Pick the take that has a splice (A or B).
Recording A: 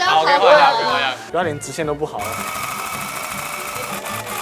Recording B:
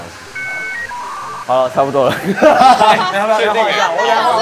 A